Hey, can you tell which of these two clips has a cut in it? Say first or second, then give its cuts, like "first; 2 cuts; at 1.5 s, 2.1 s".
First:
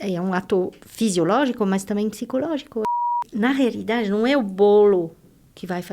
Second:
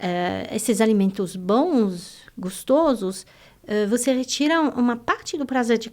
first; 1 cut; at 2.9 s